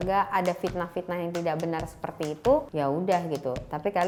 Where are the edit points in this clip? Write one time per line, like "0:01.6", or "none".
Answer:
none